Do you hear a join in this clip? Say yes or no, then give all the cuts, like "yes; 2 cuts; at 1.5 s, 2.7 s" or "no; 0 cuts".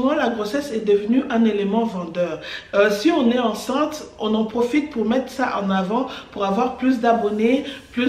no; 0 cuts